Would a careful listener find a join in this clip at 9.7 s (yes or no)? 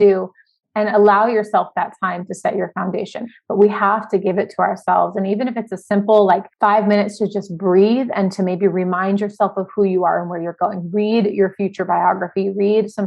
no